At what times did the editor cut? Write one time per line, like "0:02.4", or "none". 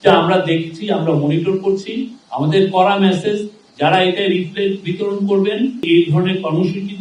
0:05.9

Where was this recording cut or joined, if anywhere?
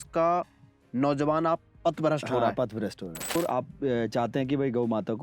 0:03.4

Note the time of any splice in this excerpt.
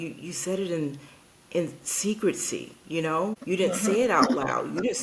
0:03.4

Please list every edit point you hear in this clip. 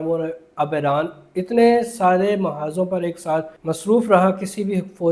0:03.5

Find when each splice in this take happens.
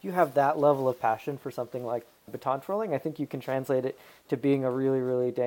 0:02.3

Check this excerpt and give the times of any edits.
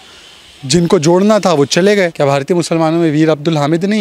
0:02.1

